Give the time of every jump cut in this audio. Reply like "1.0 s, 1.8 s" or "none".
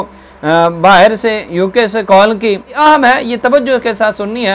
2.7 s